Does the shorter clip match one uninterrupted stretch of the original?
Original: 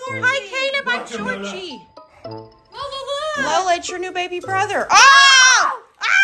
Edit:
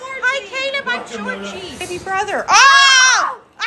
no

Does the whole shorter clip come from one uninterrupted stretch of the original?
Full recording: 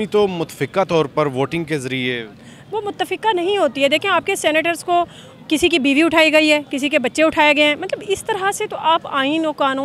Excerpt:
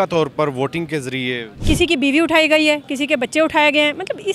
no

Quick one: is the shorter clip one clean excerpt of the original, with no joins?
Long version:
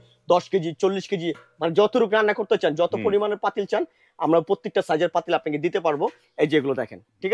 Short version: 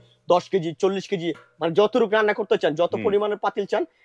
yes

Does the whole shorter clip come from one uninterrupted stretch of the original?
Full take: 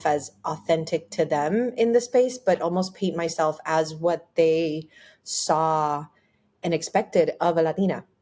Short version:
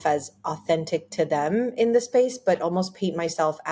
yes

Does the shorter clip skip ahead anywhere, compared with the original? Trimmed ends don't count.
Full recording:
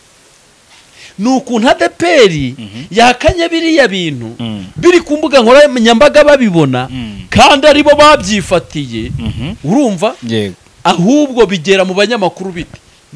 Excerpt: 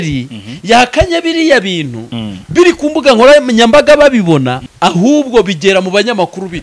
yes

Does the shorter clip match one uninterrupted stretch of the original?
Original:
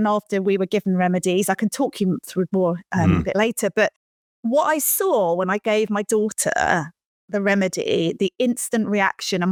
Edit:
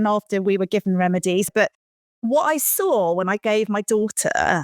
no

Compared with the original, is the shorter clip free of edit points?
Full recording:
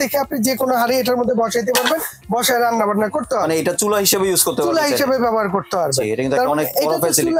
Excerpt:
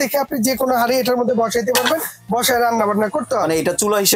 yes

